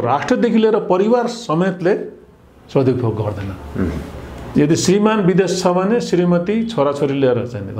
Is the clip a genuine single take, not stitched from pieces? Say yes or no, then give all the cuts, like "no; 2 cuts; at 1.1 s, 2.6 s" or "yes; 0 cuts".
no; 1 cut; at 4.5 s